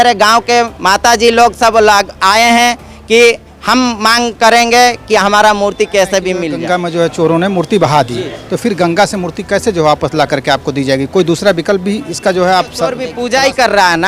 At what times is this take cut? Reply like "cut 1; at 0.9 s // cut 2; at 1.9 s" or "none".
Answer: cut 1; at 6.6 s // cut 2; at 13.1 s